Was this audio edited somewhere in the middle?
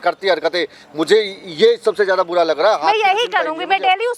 no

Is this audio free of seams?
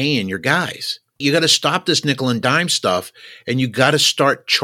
no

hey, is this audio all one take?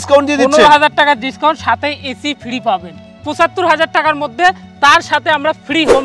no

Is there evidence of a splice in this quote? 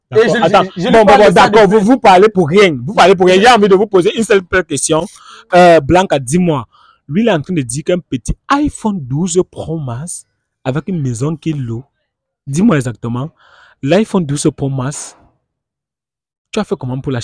no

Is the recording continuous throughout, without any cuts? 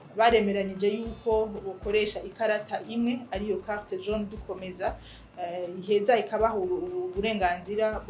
yes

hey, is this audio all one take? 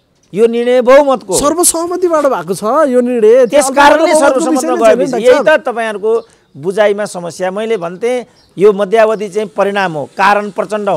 yes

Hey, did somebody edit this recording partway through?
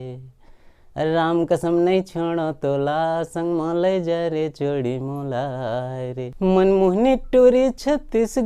yes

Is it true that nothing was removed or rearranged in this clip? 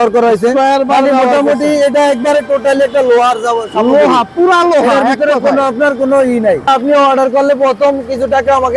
no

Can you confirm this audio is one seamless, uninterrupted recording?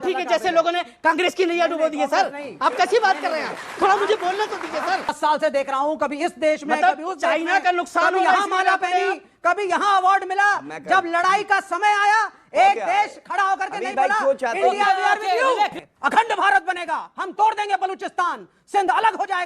no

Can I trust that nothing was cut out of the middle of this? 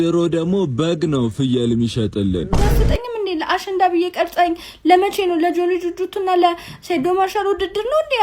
no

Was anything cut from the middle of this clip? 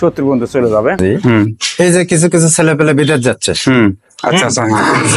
yes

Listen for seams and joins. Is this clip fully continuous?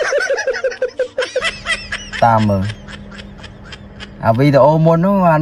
yes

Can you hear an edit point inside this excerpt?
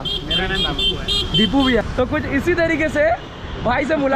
yes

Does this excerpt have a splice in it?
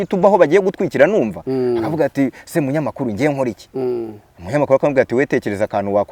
no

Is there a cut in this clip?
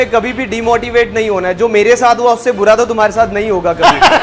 no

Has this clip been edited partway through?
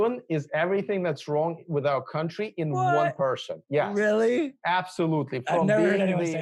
no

